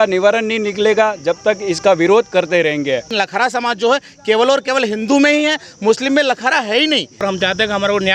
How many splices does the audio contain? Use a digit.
2